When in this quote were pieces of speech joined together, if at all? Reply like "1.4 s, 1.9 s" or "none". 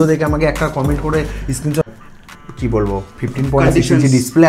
1.9 s